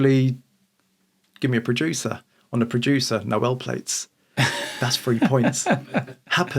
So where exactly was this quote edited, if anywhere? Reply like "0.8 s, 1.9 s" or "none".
none